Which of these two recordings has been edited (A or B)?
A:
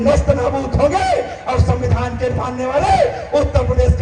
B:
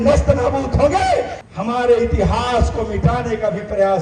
B